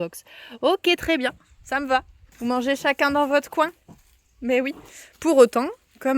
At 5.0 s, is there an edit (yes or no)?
no